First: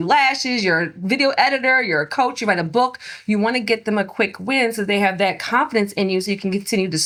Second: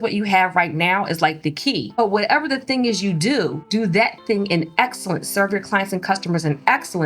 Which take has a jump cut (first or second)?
second